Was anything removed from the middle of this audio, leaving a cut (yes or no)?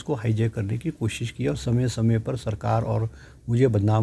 no